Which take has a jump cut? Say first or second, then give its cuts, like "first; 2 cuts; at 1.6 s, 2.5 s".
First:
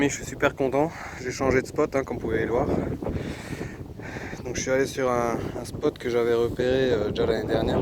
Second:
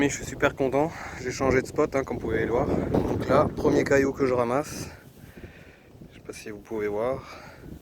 second; 1 cut; at 3.0 s